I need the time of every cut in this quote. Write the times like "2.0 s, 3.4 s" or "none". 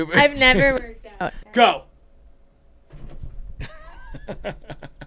1.4 s

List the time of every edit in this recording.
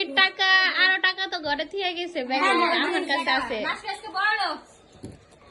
none

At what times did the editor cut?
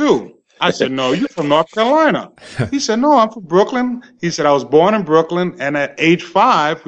none

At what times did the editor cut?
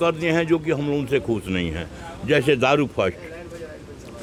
none

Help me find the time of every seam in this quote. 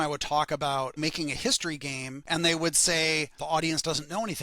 1.0 s, 2.3 s, 3.4 s

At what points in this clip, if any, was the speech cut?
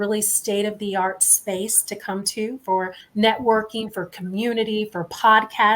3.0 s

